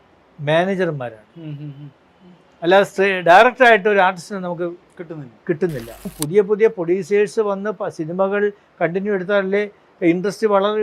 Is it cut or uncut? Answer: cut